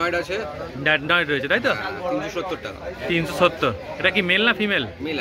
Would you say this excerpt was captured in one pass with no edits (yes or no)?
yes